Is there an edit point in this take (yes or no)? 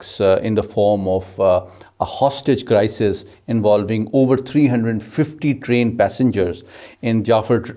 no